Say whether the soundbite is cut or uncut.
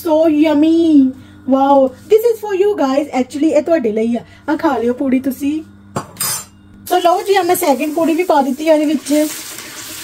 uncut